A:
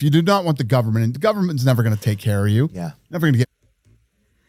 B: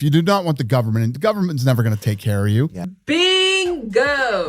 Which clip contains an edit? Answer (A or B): B